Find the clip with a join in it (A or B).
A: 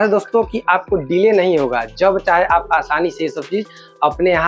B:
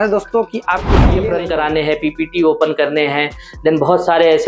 B